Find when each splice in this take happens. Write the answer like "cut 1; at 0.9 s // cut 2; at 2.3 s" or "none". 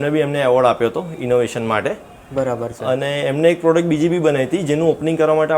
none